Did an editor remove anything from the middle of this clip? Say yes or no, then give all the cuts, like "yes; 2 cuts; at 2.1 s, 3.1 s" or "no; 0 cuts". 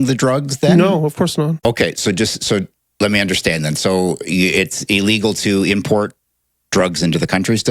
yes; 1 cut; at 1.6 s